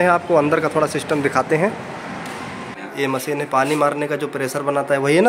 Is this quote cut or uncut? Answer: cut